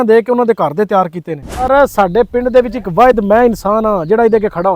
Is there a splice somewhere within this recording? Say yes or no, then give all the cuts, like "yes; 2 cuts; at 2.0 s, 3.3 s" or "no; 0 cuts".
yes; 1 cut; at 1.7 s